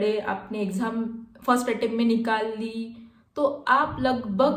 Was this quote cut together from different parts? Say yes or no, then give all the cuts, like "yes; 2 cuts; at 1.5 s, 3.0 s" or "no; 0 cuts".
no; 0 cuts